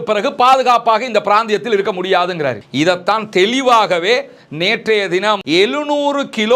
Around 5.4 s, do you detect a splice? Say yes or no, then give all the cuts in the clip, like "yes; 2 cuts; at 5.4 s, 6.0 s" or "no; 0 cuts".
yes; 1 cut; at 5.4 s